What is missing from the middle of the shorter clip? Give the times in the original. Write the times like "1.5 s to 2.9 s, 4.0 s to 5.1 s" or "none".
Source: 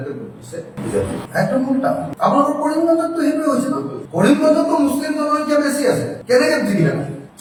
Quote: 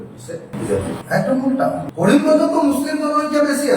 2.1 s to 4.0 s